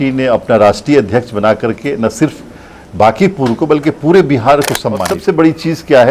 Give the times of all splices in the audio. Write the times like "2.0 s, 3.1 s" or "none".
5.1 s